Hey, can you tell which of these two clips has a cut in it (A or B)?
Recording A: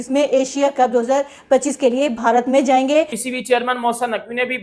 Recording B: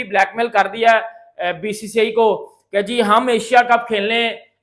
A